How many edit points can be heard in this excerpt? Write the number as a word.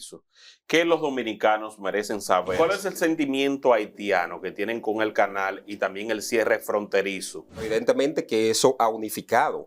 two